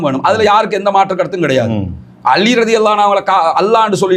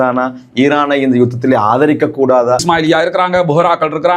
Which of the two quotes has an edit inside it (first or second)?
second